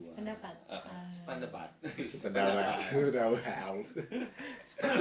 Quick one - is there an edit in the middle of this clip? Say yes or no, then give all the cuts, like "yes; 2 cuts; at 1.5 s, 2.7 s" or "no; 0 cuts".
no; 0 cuts